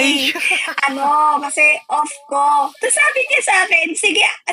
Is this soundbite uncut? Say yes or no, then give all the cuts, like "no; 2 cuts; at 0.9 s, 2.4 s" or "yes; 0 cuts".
yes; 0 cuts